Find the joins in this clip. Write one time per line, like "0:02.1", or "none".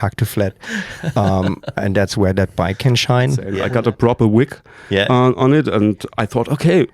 0:03.5

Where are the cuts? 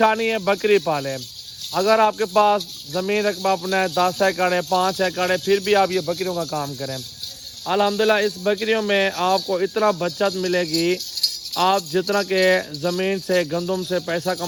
none

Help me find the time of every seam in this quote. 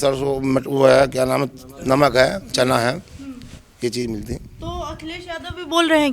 none

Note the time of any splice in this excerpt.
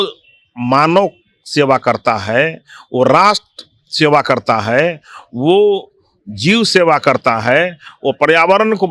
none

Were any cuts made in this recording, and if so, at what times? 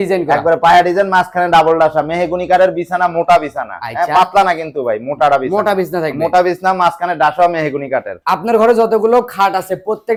none

